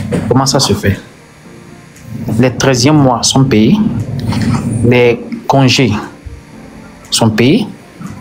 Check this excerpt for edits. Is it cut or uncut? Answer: uncut